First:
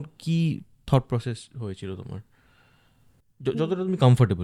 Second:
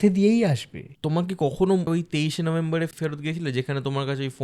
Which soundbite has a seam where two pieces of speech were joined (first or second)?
second